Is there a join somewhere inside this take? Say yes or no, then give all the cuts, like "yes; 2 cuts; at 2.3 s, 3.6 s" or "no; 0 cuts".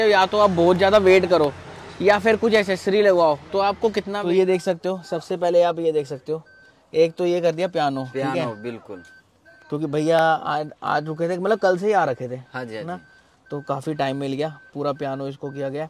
yes; 1 cut; at 4.2 s